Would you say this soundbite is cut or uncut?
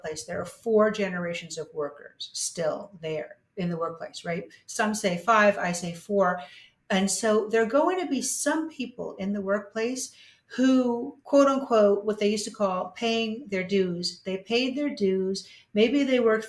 uncut